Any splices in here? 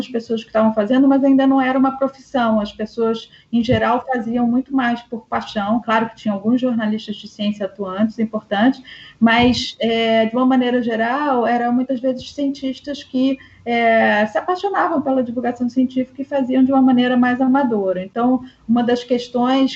no; 0 cuts

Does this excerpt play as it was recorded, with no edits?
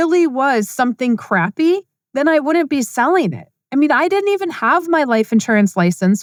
yes; 0 cuts

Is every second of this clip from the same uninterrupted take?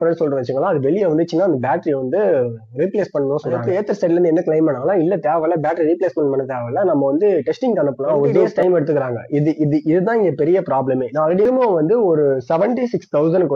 no; 3 cuts; at 3.6 s, 8.5 s, 11.4 s

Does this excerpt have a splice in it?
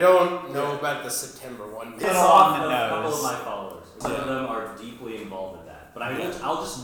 yes; 2 cuts; at 2.0 s, 4.0 s

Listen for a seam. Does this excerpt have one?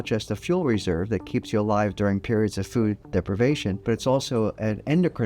yes; 1 cut; at 3.8 s

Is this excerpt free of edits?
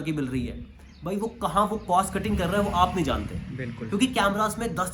yes; 0 cuts

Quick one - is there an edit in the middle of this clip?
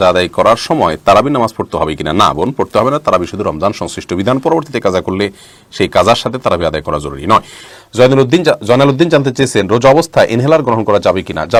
no; 0 cuts

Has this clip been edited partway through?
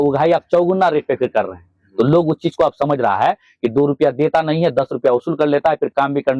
no; 0 cuts

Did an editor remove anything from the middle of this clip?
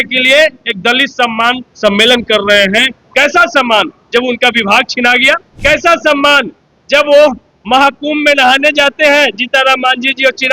yes; 1 cut; at 5.5 s

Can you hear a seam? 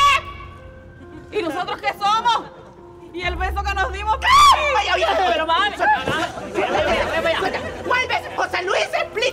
no; 0 cuts

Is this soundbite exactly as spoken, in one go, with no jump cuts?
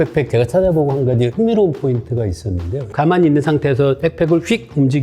no; 2 cuts; at 1.3 s, 2.9 s

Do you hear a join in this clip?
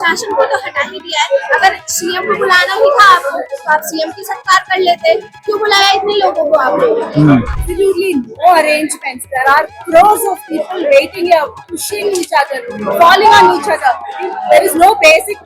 yes; 1 cut; at 7.6 s

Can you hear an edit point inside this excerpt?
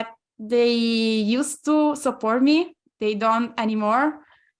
no; 0 cuts

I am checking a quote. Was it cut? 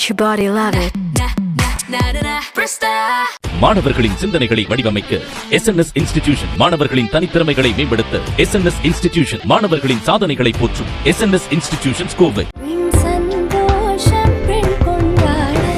no; 0 cuts

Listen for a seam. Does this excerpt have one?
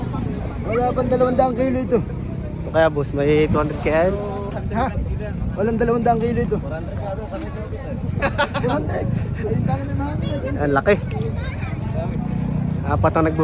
no; 0 cuts

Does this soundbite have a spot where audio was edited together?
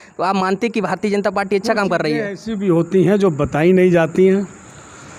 no; 0 cuts

